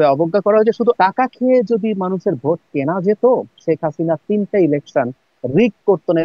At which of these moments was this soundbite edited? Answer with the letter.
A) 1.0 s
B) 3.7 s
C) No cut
A